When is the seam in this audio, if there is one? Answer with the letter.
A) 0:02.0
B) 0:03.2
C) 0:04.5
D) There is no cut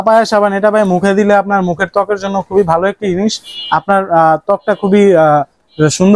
D